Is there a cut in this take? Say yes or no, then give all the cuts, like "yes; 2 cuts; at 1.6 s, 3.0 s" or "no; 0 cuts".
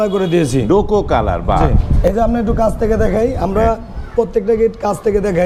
no; 0 cuts